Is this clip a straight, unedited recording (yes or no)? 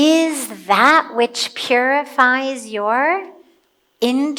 yes